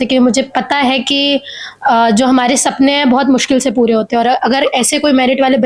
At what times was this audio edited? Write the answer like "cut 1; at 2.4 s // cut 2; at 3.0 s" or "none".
none